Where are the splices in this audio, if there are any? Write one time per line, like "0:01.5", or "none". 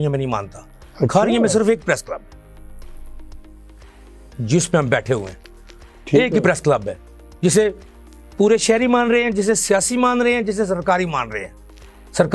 none